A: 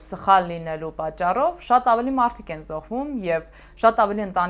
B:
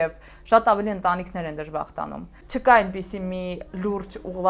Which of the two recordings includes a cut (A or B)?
B